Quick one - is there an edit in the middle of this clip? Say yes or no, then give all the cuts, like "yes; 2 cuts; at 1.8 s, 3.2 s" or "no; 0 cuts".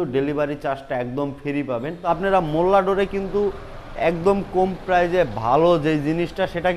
yes; 1 cut; at 2.1 s